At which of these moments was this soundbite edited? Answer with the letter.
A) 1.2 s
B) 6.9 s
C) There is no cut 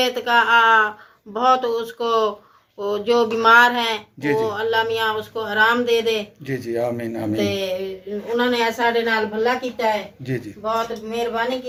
C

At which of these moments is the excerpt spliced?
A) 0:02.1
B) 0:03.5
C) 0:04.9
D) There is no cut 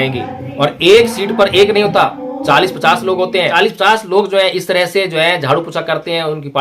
B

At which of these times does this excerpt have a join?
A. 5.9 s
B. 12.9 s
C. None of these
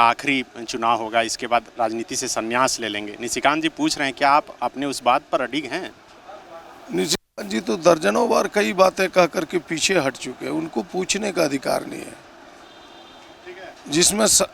C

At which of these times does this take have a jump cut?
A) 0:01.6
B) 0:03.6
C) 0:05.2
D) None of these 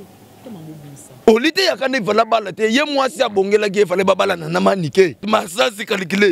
C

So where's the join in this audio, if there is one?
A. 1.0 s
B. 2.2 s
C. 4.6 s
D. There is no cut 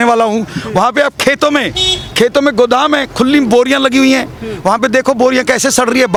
D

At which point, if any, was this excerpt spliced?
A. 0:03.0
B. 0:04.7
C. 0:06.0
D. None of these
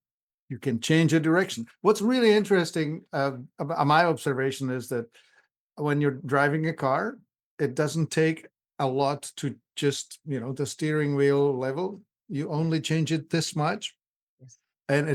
D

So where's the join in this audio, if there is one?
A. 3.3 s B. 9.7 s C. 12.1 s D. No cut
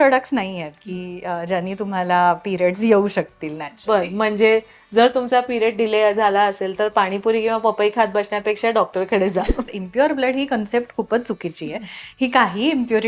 B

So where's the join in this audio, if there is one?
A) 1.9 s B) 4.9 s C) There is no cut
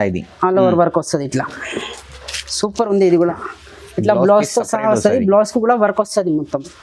C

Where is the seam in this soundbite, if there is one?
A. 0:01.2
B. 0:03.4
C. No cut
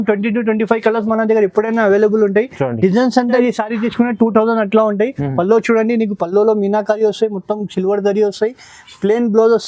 B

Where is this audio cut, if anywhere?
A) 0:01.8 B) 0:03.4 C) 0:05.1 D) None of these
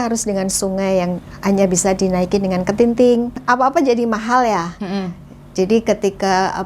B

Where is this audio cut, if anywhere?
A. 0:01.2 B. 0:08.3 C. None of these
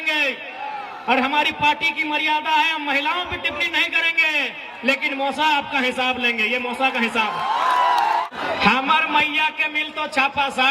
B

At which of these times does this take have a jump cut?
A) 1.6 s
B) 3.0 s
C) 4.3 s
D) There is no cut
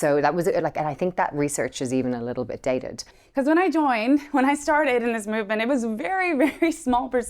B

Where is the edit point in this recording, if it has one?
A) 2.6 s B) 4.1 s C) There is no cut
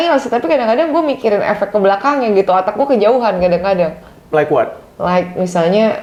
C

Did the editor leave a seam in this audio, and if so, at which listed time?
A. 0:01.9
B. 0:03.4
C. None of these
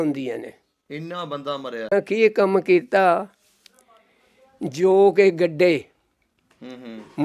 A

